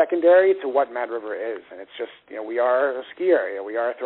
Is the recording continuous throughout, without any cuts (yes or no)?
yes